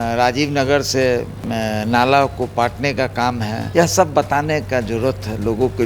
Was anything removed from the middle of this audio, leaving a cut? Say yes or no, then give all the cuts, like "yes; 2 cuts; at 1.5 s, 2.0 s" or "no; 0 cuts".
yes; 2 cuts; at 1.4 s, 3.6 s